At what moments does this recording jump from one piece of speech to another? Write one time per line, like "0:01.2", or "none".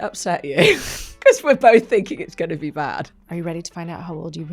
0:03.0